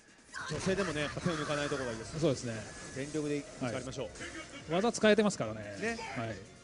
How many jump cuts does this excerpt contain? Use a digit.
1